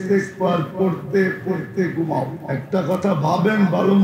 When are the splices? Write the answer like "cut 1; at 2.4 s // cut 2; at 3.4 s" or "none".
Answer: cut 1; at 2.4 s